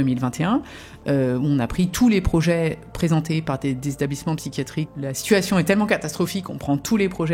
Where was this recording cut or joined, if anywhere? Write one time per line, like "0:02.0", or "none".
0:04.9